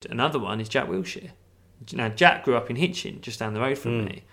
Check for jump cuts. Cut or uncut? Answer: uncut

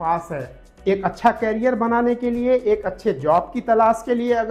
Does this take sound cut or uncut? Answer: uncut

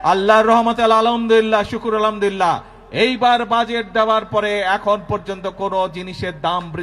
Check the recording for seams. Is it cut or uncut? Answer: uncut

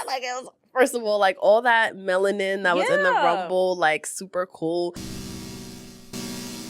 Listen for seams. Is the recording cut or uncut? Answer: cut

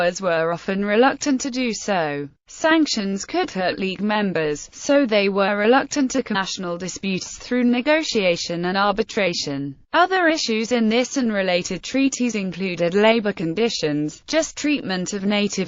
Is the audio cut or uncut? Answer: uncut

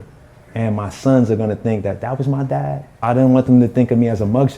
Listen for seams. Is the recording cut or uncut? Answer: cut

